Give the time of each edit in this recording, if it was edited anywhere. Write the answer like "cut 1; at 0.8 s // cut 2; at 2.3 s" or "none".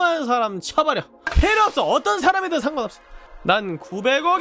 cut 1; at 1.2 s

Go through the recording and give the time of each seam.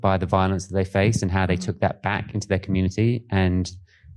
none

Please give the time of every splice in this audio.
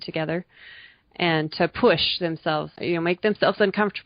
cut 1; at 2.8 s

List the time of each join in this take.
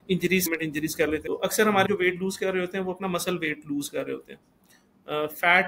cut 1; at 1.2 s

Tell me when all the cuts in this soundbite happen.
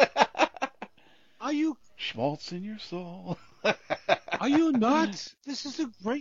cut 1; at 5.2 s

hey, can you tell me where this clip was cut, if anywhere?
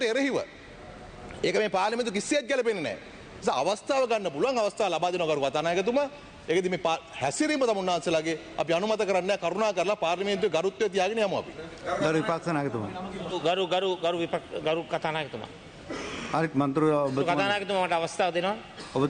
none

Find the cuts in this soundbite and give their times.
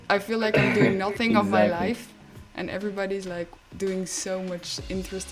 none

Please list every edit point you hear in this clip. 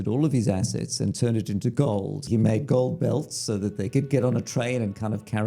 cut 1; at 2.3 s

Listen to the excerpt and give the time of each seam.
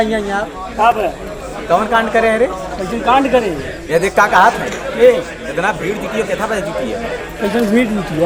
none

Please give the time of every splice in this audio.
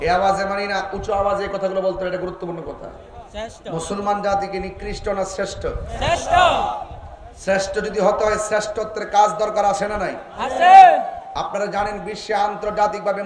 none

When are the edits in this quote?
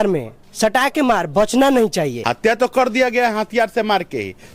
cut 1; at 2.2 s

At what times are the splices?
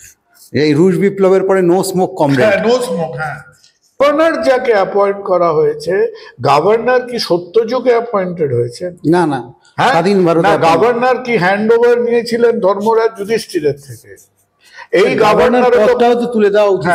cut 1; at 4.0 s

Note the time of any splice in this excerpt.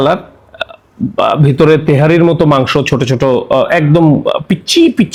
none

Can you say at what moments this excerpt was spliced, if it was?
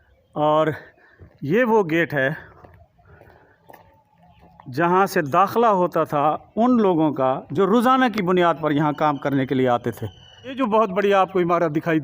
cut 1; at 10.5 s

